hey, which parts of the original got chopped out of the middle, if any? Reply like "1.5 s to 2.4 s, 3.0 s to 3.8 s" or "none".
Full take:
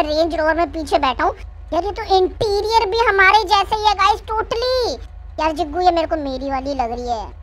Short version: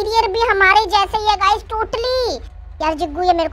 none

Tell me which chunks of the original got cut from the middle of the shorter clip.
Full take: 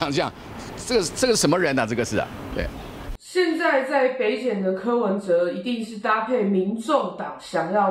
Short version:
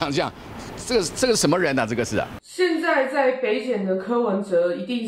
2.4 s to 3.2 s

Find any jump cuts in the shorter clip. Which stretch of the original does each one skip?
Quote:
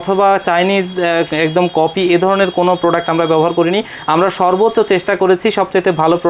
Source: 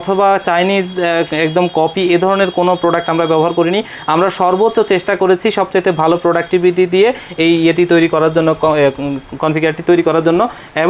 none

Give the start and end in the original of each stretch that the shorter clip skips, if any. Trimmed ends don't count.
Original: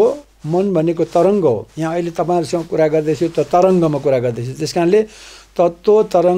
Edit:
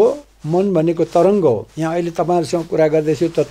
none

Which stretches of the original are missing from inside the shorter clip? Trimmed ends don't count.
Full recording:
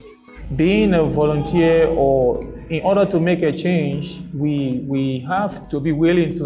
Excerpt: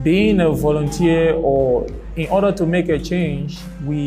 none

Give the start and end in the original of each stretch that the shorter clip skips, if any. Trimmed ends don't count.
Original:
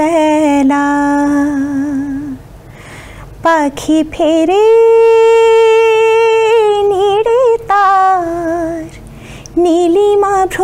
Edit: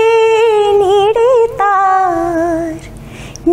none

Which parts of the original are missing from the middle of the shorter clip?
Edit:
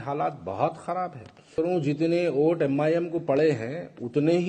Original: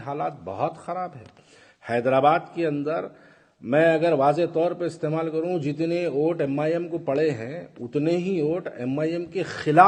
1.5 s to 5.3 s

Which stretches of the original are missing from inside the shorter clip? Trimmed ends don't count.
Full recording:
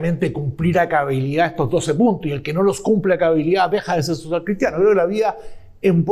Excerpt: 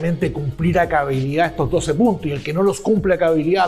none

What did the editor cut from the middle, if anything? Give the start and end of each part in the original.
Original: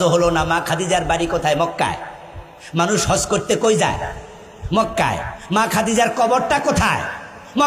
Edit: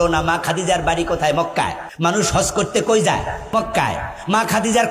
2.1 s to 2.6 s, 4.2 s to 4.7 s

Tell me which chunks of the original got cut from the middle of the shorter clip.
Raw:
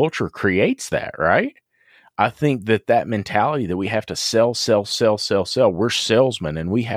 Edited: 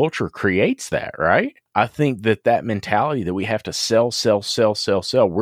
1.6 s to 2.0 s

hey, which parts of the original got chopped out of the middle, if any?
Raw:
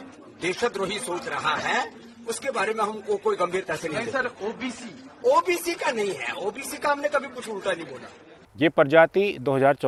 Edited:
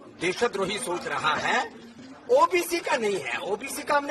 2.1 s to 4.9 s

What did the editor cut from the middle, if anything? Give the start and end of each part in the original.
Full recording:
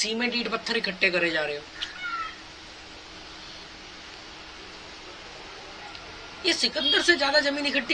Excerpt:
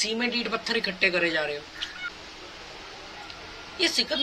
2.1 s to 4.7 s

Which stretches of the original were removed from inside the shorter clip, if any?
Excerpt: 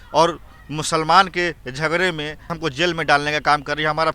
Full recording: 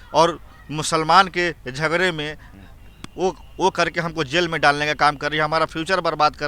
2.5 s to 4.0 s

